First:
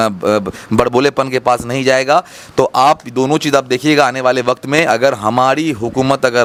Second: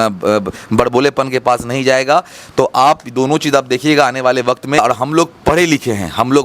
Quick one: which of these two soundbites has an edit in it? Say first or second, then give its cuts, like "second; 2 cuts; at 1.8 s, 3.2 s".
second; 1 cut; at 4.8 s